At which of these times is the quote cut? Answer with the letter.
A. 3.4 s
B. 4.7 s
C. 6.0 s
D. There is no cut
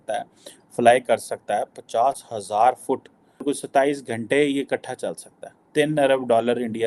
A